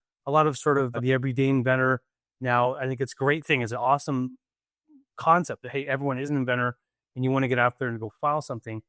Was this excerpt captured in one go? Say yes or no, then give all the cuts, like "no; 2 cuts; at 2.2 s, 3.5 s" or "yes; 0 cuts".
yes; 0 cuts